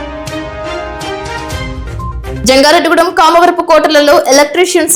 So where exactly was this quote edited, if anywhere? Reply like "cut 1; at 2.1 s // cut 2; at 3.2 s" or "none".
none